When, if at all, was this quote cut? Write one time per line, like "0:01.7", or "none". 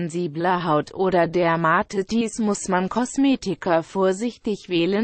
0:01.3